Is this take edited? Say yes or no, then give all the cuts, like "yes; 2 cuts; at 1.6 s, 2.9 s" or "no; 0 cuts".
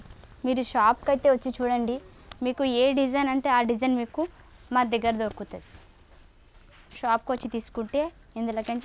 yes; 1 cut; at 6.9 s